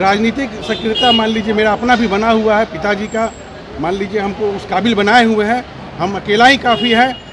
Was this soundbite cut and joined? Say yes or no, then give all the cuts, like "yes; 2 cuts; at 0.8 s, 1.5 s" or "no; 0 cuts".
no; 0 cuts